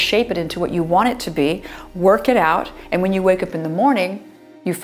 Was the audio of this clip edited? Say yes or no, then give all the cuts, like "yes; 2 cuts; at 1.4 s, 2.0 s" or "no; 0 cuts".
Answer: no; 0 cuts